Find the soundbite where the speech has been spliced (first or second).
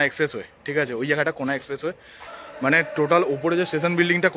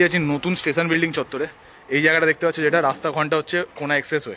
first